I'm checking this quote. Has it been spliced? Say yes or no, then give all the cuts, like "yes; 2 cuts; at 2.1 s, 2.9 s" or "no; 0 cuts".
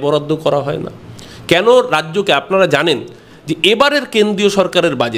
no; 0 cuts